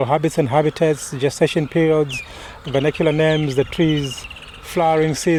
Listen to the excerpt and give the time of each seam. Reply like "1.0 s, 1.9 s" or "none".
none